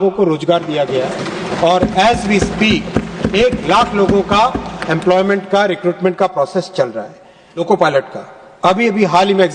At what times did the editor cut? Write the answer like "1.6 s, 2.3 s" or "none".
7.5 s